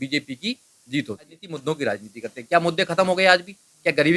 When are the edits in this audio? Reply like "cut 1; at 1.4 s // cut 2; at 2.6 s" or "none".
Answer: cut 1; at 1.5 s

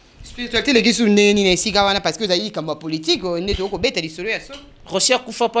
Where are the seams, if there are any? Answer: none

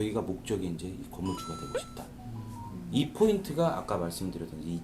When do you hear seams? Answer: none

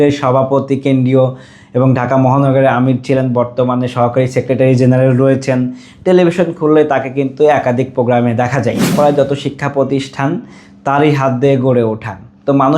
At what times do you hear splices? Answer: cut 1; at 8.9 s

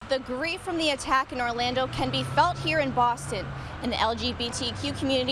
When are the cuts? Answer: none

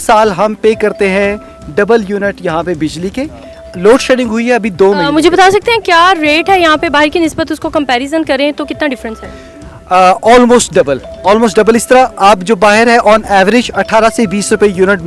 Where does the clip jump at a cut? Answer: none

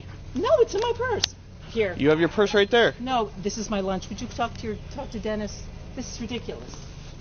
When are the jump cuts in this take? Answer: none

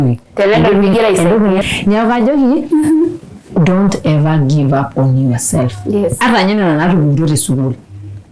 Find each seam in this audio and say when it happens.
cut 1; at 1.6 s

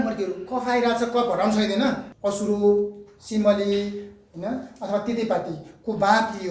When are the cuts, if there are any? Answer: cut 1; at 2.1 s

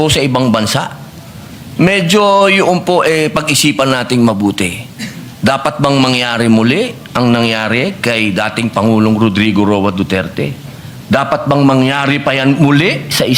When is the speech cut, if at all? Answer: none

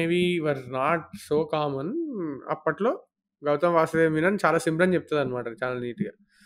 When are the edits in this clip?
none

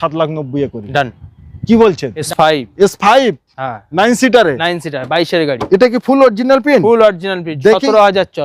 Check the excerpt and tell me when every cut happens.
cut 1; at 2.1 s

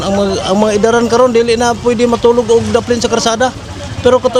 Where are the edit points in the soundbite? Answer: none

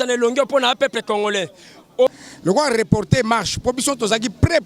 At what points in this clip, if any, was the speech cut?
cut 1; at 2.1 s

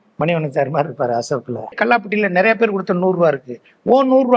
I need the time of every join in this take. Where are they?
cut 1; at 1.7 s

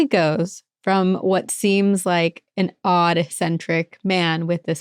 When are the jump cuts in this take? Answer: none

